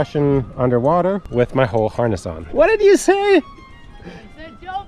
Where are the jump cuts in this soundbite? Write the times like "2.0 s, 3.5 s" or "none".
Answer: 1.2 s, 2.4 s